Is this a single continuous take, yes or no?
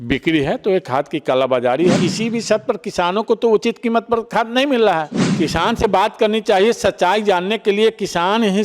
no